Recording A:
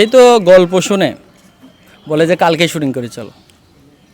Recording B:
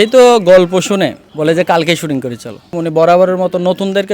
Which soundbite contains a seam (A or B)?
B